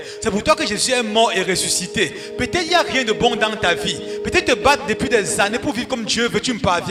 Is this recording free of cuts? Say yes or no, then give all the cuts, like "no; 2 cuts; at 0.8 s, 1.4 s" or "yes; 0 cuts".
yes; 0 cuts